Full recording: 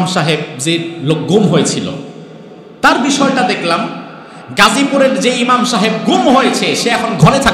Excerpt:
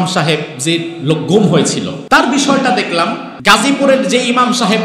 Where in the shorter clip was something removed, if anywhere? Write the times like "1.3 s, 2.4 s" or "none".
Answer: 1.9 s, 3.3 s